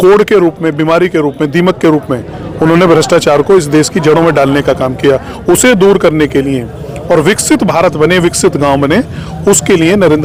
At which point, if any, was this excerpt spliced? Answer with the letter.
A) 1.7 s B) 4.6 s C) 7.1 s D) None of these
D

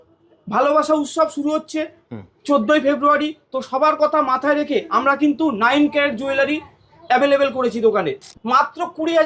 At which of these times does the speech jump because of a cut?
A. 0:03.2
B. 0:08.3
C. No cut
B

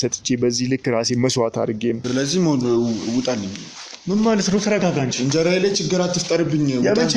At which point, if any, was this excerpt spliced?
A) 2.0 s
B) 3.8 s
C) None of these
A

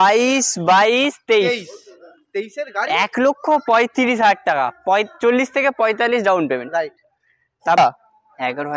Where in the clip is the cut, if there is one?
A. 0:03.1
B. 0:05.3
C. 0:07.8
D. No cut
C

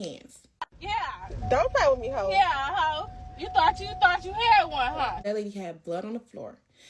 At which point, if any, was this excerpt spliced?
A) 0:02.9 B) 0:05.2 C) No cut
B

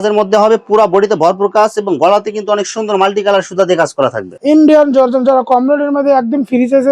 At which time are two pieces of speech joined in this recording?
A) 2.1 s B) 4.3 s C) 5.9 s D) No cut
B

